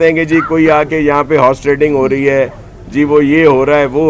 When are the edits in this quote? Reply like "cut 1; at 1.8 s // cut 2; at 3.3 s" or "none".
none